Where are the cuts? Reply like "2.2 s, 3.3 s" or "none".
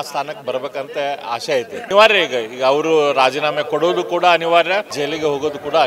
1.9 s, 4.9 s